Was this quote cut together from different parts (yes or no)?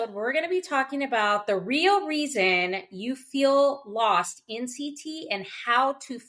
no